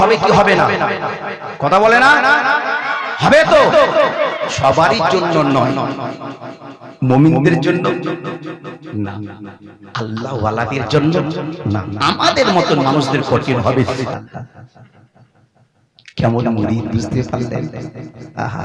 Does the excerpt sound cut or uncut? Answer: cut